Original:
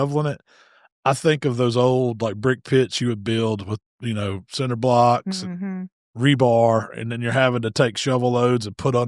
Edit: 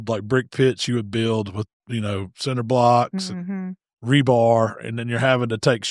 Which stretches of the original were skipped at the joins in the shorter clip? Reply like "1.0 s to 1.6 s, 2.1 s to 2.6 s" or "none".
none